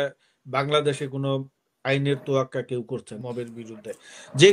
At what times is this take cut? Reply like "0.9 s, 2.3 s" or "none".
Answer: 3.2 s